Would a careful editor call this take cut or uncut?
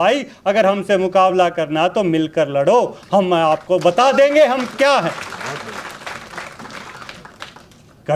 uncut